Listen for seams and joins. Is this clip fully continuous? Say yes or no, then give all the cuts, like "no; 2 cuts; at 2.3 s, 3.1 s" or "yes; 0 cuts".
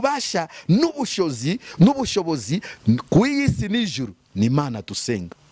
yes; 0 cuts